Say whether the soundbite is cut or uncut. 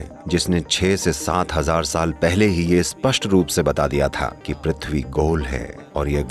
uncut